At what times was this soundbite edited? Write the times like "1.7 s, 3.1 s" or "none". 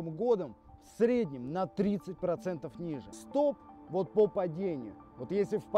3.1 s

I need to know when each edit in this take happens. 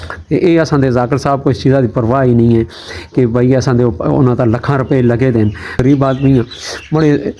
5.8 s

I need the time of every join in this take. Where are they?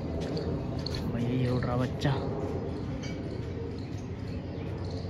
none

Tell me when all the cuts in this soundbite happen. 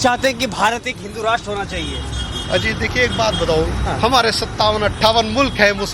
none

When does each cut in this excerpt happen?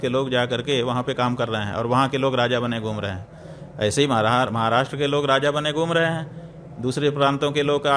none

